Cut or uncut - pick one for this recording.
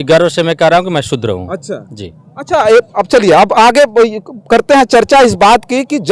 uncut